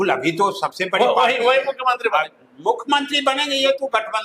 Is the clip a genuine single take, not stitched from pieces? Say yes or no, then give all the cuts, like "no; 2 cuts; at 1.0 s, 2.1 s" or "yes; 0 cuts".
yes; 0 cuts